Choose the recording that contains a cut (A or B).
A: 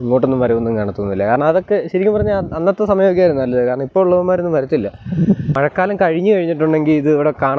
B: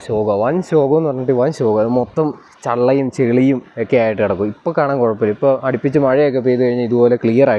A